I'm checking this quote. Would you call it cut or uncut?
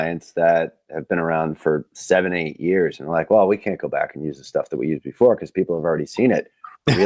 uncut